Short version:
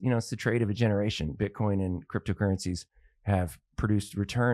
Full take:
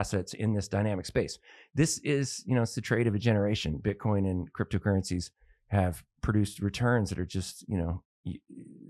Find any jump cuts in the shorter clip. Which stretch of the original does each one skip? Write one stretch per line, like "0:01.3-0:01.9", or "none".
none